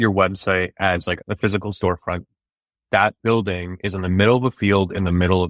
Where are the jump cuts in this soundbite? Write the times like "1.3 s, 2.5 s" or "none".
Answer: 1.1 s, 2.4 s